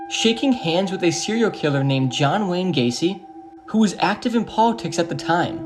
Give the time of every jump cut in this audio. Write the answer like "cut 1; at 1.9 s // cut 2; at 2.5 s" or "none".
none